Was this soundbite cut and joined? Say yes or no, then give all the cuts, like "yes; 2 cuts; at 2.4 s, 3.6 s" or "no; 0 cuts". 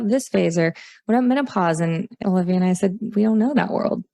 yes; 1 cut; at 2.2 s